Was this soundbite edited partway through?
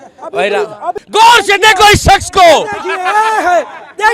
yes; 1 cut; at 1.0 s

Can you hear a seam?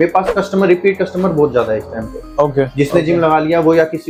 no; 0 cuts

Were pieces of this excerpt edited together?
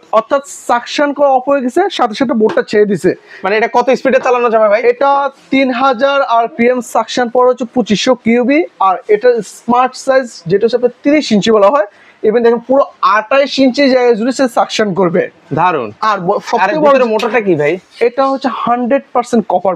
no; 0 cuts

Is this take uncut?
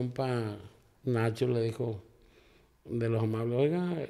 yes; 0 cuts

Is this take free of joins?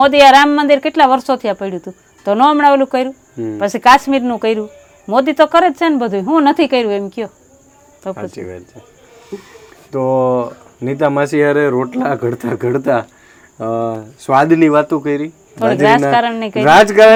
yes; 0 cuts

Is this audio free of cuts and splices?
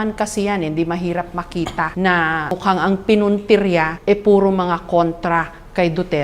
no; 3 cuts; at 1.9 s, 2.5 s, 3.9 s

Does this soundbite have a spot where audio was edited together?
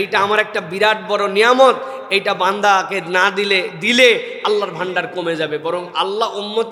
no; 0 cuts

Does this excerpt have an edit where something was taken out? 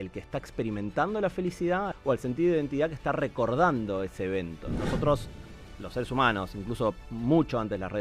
yes; 2 cuts; at 1.9 s, 4.6 s

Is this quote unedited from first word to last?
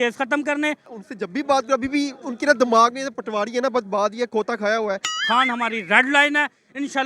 no; 2 cuts; at 0.9 s, 5.1 s

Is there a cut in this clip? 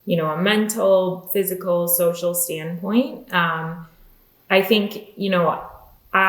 no; 0 cuts

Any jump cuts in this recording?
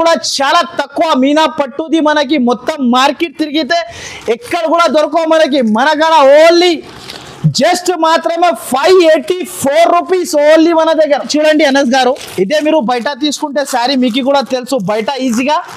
yes; 1 cut; at 11.3 s

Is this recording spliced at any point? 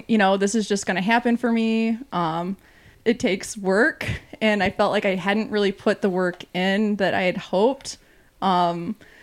yes; 1 cut; at 2.9 s

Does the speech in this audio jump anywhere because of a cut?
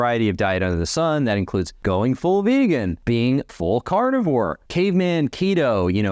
yes; 3 cuts; at 1.7 s, 3.4 s, 4.6 s

